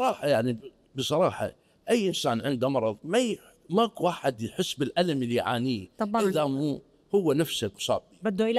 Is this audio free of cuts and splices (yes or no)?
yes